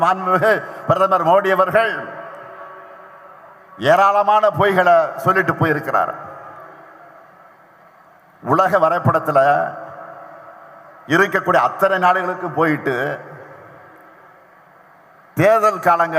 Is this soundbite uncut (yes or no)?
yes